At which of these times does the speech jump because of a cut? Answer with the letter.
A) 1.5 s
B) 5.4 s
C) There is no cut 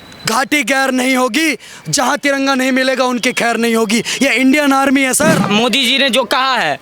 B